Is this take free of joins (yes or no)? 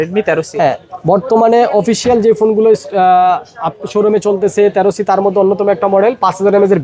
yes